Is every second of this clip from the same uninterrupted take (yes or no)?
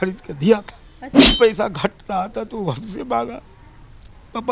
yes